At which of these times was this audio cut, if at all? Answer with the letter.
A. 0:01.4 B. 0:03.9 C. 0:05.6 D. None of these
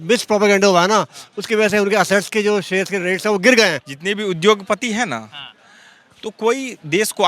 B